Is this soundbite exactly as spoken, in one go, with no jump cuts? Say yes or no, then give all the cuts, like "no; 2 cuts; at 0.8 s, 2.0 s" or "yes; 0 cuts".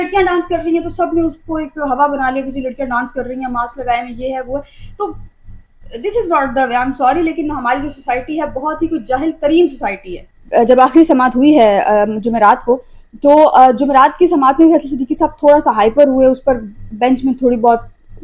no; 1 cut; at 10.3 s